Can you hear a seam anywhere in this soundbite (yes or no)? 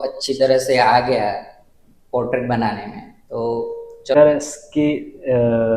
yes